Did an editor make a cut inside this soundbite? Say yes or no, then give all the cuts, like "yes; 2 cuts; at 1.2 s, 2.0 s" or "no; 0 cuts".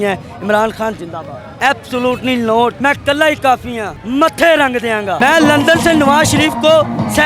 yes; 2 cuts; at 1.5 s, 5.2 s